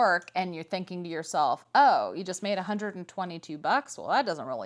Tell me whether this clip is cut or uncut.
uncut